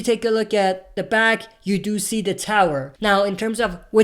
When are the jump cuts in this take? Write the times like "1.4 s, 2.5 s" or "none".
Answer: 2.9 s